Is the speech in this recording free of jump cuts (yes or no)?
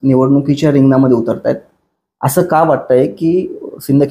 yes